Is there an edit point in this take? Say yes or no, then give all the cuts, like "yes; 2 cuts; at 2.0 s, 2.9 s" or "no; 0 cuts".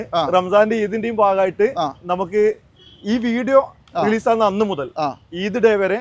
no; 0 cuts